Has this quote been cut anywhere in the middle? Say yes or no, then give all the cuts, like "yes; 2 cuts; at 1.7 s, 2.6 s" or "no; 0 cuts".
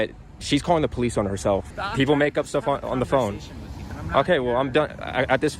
yes; 1 cut; at 1.7 s